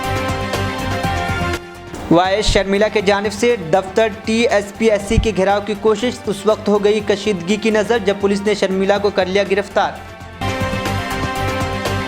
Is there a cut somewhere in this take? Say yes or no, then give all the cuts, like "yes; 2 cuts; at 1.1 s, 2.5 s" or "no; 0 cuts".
yes; 1 cut; at 1.5 s